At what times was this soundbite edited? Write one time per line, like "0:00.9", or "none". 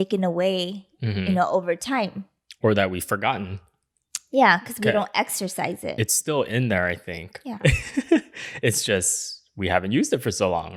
none

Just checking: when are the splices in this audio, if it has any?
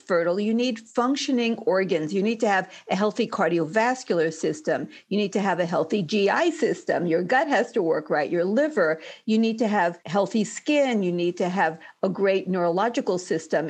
none

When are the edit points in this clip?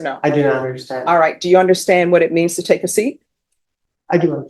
none

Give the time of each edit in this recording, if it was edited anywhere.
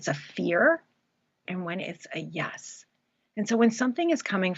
0:01.4

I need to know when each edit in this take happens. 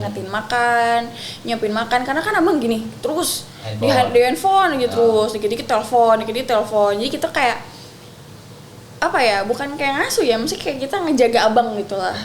none

